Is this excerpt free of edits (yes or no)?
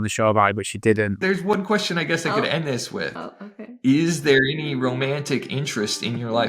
no